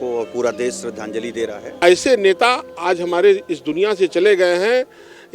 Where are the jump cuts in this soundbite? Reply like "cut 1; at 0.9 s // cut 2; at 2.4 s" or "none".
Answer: cut 1; at 1.7 s